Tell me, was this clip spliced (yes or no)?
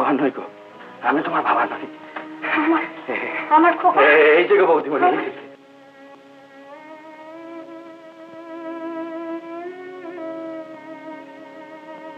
no